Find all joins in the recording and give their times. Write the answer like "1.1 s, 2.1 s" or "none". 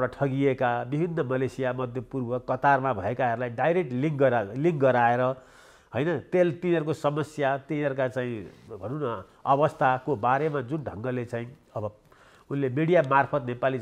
none